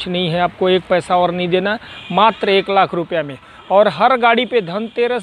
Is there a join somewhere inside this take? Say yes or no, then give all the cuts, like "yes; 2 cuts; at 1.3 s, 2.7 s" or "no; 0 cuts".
no; 0 cuts